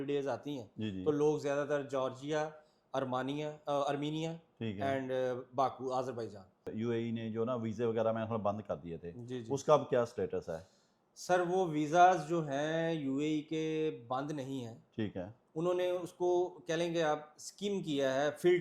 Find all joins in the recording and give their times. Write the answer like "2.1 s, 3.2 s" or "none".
6.7 s